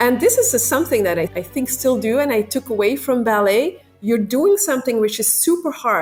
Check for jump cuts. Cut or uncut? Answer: uncut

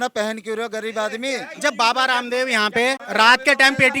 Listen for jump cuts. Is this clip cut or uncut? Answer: cut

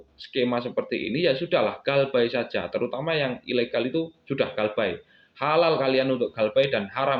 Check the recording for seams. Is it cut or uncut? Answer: uncut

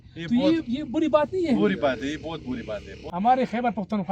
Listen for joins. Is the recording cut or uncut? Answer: cut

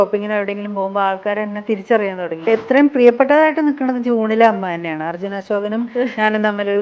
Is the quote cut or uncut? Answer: cut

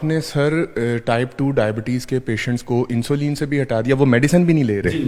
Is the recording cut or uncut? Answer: uncut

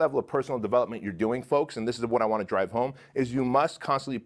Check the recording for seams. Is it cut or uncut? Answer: uncut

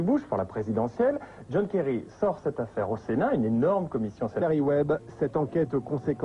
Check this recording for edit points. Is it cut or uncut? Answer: uncut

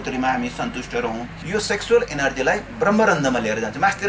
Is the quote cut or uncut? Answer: cut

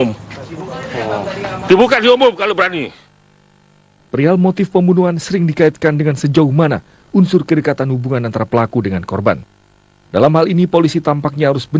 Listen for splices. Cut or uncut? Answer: cut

